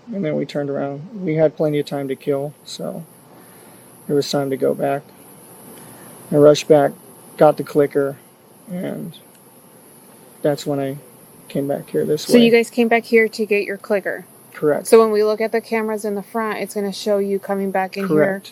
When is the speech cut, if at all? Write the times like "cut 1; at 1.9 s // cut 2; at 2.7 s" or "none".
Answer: none